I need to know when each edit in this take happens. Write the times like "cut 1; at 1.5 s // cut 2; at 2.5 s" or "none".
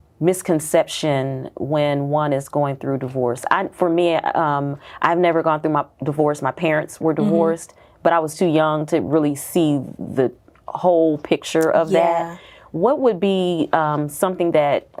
none